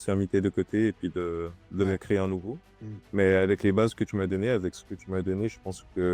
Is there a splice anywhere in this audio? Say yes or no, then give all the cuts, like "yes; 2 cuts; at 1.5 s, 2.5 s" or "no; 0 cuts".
yes; 1 cut; at 2.7 s